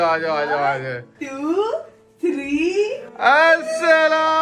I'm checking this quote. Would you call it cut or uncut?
uncut